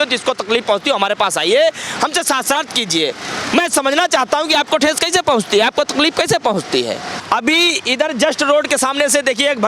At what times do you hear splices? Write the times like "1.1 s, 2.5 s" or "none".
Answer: 7.2 s